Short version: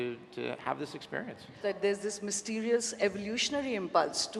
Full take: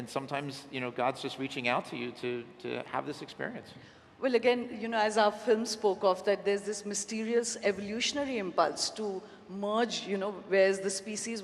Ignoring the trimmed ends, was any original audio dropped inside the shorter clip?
yes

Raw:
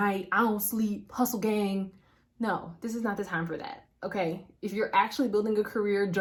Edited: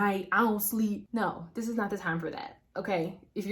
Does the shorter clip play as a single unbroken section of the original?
no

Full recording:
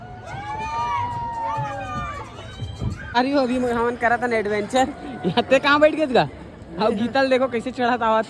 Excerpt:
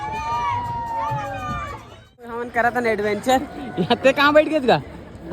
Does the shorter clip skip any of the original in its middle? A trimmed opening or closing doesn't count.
yes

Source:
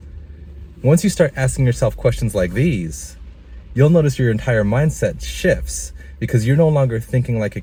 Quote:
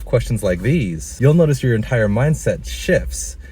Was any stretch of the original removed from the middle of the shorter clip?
yes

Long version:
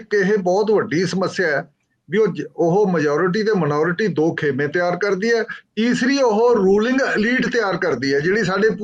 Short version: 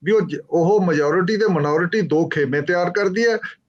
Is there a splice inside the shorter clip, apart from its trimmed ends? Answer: no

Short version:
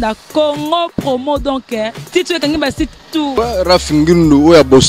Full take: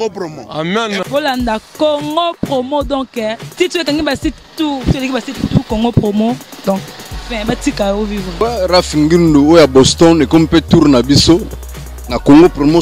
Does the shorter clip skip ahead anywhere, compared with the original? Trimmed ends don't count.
yes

